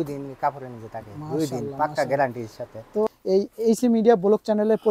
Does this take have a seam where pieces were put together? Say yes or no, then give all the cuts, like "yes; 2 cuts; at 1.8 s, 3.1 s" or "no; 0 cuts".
yes; 1 cut; at 3.1 s